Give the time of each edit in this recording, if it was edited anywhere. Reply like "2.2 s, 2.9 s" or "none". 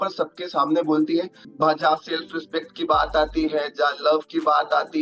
1.4 s